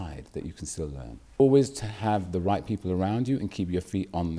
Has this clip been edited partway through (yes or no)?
yes